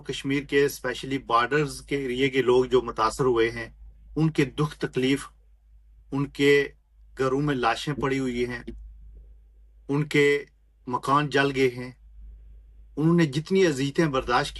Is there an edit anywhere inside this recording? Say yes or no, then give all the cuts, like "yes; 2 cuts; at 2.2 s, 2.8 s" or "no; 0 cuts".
no; 0 cuts